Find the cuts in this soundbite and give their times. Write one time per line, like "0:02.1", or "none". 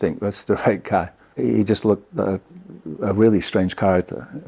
0:01.2